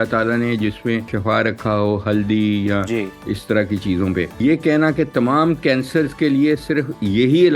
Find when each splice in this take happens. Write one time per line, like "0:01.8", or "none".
0:01.1
0:04.3